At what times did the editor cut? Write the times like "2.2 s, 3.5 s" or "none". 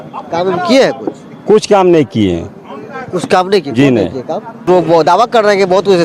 4.7 s